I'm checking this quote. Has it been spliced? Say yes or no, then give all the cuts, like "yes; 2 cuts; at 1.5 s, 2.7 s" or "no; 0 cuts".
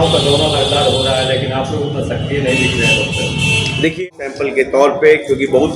yes; 1 cut; at 4.0 s